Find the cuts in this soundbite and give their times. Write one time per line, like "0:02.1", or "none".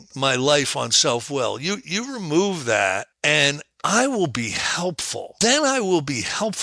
0:03.1
0:05.3

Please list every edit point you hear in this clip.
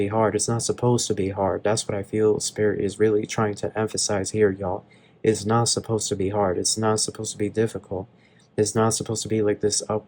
none

